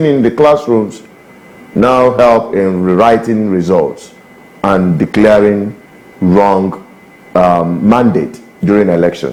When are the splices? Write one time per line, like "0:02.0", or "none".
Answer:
none